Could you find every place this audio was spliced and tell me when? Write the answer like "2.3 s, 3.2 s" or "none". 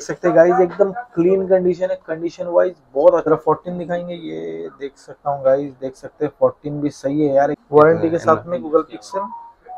3.3 s, 7.6 s